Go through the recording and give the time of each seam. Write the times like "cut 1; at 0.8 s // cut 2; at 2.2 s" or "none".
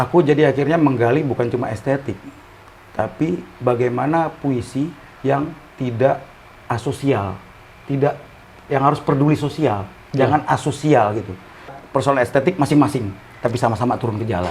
cut 1; at 11.8 s